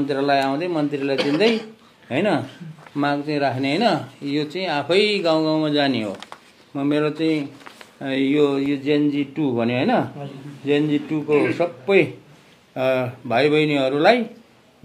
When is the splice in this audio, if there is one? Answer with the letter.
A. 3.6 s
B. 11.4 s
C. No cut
C